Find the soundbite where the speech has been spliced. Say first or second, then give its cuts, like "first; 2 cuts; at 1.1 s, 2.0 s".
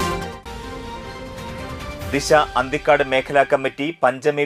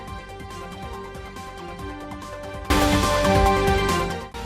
second; 1 cut; at 1.6 s